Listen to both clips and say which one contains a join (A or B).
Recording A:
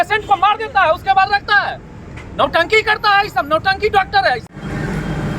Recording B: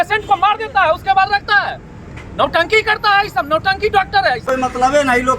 B